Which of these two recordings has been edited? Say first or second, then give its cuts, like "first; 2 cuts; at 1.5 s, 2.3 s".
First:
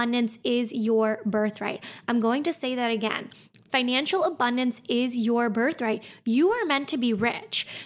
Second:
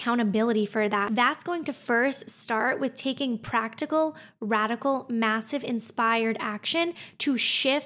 second; 1 cut; at 1.0 s